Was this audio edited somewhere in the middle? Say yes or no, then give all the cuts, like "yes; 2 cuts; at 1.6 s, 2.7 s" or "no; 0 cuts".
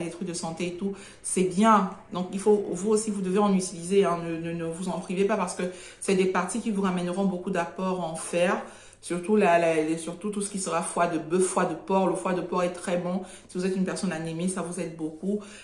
no; 0 cuts